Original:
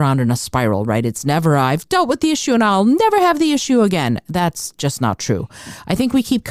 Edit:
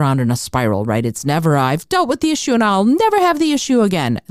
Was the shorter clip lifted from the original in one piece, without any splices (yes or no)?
yes